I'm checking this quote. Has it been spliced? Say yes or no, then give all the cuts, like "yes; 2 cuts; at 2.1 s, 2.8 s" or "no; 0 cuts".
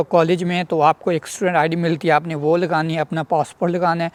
no; 0 cuts